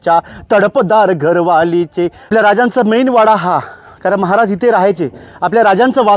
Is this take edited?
yes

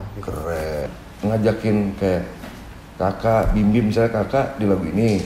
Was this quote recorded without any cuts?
no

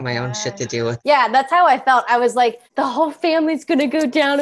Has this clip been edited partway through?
yes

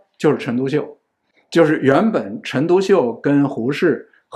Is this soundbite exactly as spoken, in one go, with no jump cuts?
yes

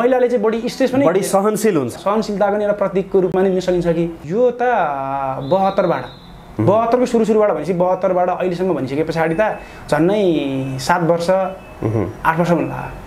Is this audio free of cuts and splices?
no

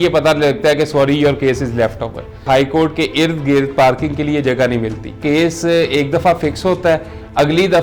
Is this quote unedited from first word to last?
no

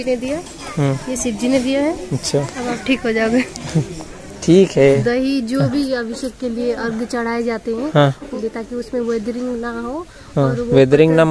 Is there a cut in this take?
yes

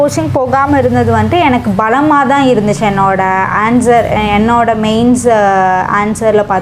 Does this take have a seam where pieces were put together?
no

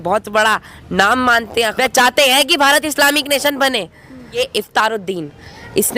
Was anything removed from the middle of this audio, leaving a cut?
yes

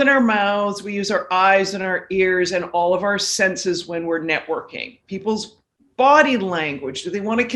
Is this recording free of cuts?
yes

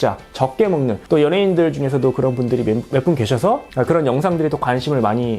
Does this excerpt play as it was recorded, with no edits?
no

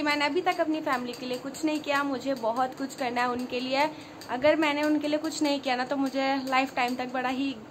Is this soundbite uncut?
yes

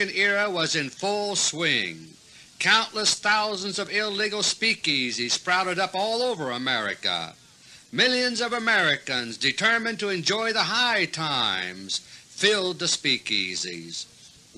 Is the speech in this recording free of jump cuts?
yes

